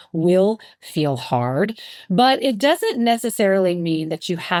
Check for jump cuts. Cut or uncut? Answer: uncut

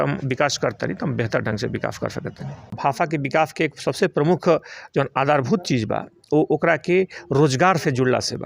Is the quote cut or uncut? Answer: cut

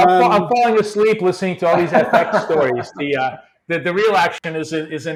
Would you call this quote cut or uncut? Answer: uncut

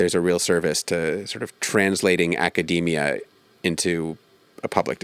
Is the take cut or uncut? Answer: uncut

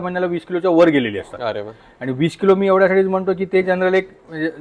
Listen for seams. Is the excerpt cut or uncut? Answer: uncut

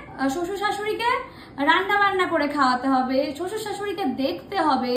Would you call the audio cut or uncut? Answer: uncut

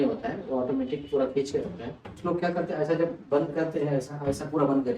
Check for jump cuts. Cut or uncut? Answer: cut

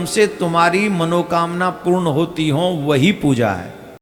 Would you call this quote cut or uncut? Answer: uncut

